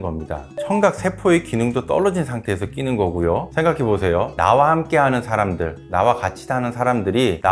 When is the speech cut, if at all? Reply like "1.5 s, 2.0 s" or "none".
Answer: 3.5 s